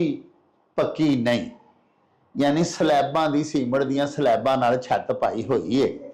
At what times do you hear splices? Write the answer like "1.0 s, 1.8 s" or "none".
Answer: none